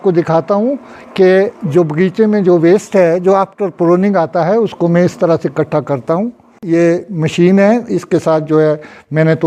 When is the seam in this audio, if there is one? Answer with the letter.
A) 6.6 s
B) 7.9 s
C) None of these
A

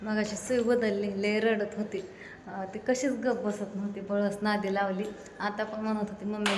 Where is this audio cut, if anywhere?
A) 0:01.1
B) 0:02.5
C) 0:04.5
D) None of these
D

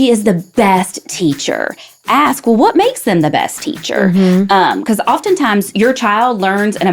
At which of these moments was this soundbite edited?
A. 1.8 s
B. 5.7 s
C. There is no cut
B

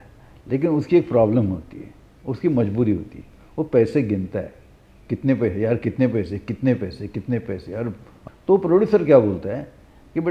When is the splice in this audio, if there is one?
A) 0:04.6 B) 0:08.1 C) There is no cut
B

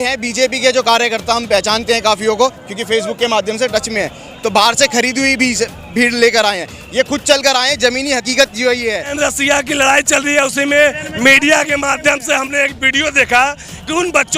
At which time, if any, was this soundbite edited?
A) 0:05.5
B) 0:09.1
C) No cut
B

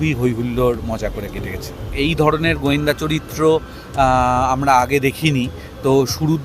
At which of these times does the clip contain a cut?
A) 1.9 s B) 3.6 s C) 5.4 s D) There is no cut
A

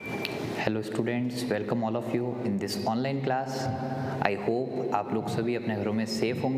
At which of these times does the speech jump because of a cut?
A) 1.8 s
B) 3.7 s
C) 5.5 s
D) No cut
A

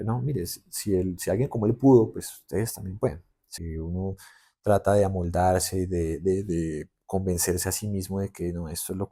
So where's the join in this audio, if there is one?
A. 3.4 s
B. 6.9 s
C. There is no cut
A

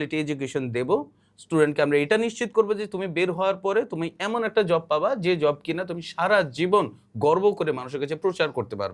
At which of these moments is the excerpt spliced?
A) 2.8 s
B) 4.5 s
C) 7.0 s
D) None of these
D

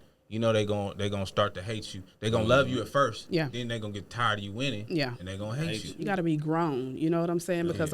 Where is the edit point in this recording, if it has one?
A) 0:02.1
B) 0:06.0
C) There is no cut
B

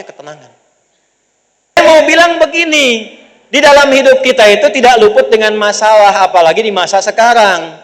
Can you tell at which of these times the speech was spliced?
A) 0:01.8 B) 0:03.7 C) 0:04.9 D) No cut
A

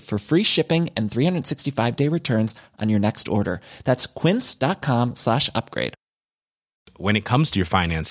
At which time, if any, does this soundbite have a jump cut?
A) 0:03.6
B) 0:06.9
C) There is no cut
C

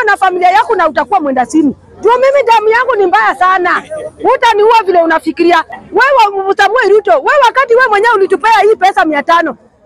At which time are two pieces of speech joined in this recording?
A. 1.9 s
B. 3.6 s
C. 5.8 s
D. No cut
C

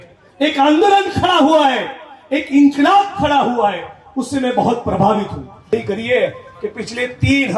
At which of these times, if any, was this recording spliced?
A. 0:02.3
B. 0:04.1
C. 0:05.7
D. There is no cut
C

